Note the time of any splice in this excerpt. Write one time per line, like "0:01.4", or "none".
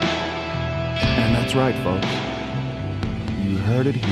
none